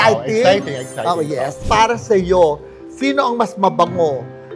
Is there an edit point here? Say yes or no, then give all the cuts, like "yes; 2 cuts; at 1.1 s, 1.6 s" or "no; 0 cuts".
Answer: yes; 1 cut; at 1.6 s